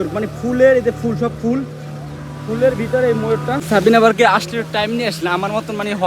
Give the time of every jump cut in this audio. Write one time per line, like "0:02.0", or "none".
0:03.7